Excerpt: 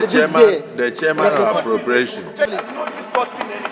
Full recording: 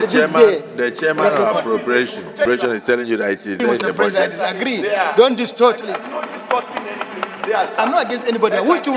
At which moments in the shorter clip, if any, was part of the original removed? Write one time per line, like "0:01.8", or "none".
0:02.5